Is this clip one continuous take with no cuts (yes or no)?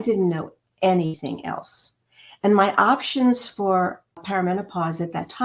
no